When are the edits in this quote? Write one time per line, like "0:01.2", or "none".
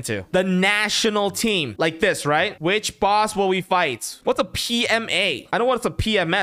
0:01.7
0:02.6
0:04.1